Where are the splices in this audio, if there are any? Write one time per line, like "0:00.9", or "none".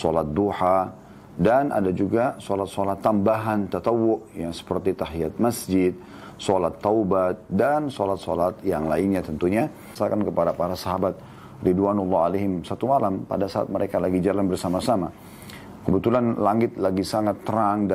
0:09.9